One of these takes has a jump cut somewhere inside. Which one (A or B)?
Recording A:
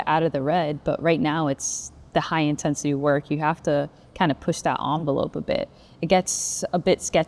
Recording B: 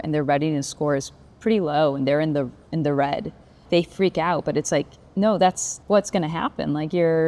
B